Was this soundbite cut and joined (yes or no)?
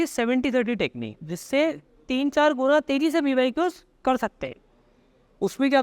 no